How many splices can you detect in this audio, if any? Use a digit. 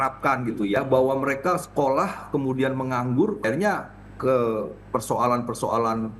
2